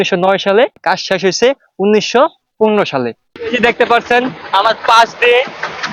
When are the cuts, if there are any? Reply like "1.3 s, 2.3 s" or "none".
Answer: 0.8 s, 3.2 s